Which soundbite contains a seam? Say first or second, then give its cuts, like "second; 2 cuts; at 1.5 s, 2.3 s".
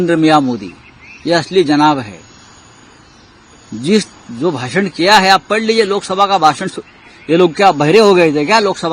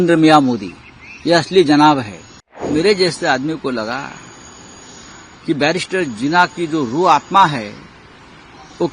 second; 1 cut; at 2.6 s